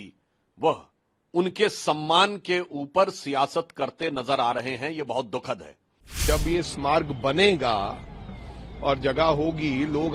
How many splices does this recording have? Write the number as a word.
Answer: one